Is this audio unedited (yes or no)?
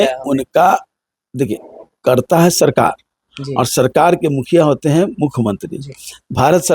yes